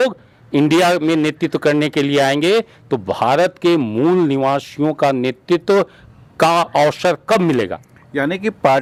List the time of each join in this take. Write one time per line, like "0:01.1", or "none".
none